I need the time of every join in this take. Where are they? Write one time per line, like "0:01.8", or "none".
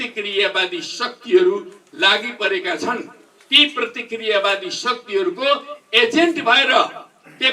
none